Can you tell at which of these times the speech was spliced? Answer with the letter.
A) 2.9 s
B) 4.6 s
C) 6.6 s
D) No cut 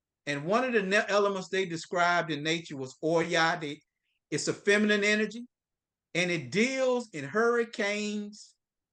D